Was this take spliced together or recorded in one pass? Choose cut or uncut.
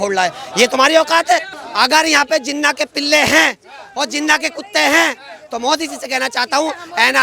cut